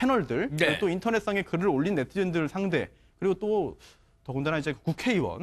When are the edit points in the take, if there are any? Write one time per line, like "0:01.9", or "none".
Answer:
0:01.6